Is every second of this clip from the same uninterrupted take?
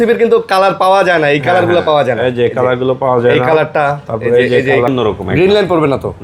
no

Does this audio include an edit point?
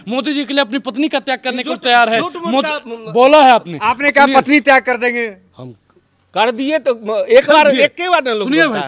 no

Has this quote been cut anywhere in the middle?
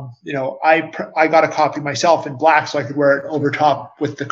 no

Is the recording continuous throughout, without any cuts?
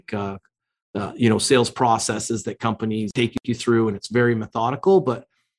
no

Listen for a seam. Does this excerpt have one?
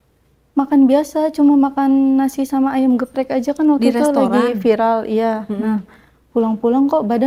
no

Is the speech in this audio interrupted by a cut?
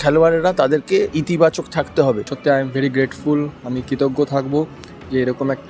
yes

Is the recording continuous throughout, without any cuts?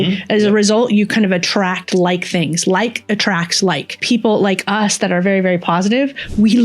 no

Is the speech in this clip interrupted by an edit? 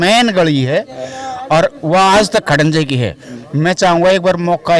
no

